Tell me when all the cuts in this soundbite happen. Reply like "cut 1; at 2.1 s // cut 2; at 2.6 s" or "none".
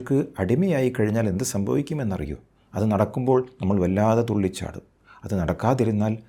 none